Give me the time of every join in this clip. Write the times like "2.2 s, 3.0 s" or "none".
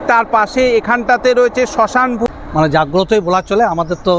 2.3 s